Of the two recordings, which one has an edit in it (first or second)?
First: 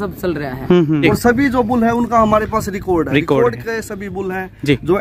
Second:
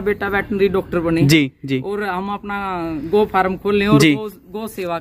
first